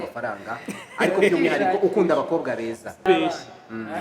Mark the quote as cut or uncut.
cut